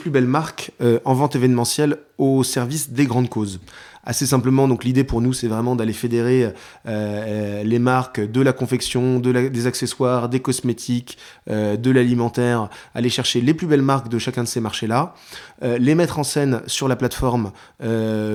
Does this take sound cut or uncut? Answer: uncut